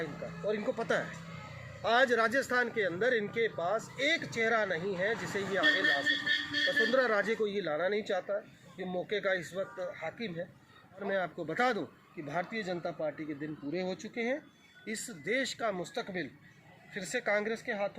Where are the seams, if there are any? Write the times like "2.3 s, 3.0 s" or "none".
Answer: 11.0 s